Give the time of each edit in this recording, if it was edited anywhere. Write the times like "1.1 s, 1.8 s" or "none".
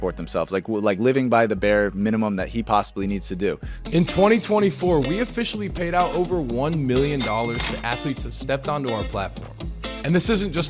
3.7 s